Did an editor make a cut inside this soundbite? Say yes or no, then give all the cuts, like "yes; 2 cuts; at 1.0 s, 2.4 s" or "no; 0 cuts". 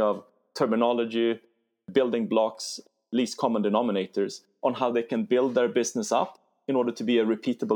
no; 0 cuts